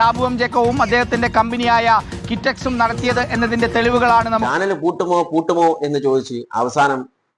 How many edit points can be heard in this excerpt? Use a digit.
1